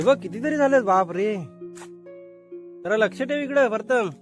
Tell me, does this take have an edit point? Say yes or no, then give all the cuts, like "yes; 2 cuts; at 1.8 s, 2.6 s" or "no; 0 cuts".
yes; 2 cuts; at 1.5 s, 2.8 s